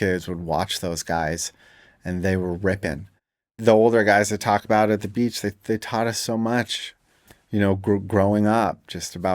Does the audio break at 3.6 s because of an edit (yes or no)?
yes